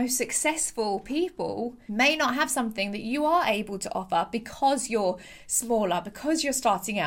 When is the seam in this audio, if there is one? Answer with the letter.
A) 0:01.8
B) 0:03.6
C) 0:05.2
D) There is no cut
A